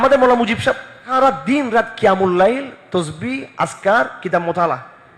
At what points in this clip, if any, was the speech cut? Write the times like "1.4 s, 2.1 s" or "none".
0.9 s